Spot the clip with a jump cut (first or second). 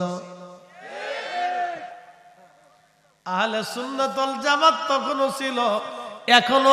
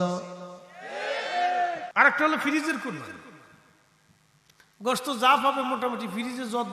second